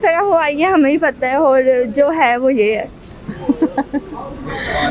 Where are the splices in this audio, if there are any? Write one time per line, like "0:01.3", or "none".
none